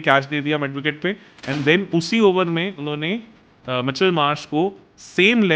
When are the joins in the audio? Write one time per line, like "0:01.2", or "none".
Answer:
none